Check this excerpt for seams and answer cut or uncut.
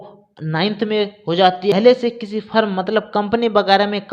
cut